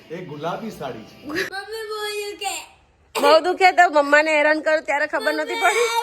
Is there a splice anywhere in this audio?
yes; 1 cut; at 1.5 s

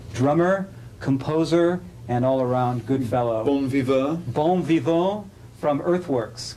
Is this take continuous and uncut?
yes; 0 cuts

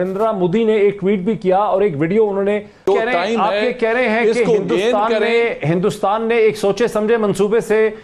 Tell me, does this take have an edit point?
yes; 1 cut; at 2.8 s

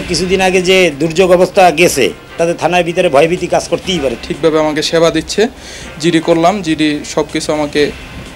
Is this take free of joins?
no; 1 cut; at 4.1 s

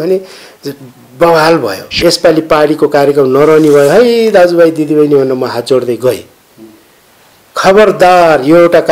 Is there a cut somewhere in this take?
yes; 1 cut; at 2.0 s

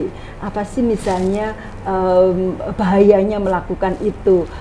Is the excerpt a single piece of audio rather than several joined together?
yes; 0 cuts

